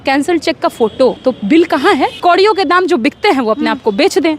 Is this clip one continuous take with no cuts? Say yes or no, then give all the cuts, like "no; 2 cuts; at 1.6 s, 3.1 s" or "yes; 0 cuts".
no; 2 cuts; at 1.2 s, 2.2 s